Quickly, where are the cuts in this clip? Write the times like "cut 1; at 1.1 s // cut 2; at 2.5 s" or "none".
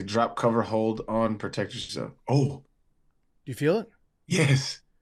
none